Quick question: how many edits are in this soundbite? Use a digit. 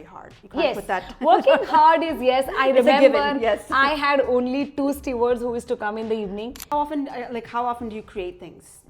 1